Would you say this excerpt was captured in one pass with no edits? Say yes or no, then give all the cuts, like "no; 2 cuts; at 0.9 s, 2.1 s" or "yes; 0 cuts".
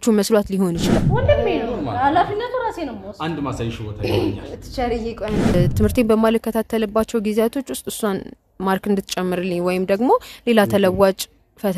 no; 2 cuts; at 0.9 s, 5.5 s